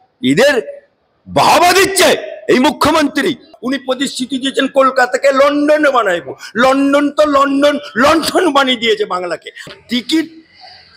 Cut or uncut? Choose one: cut